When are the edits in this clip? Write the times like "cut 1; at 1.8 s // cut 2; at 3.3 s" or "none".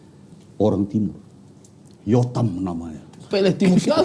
none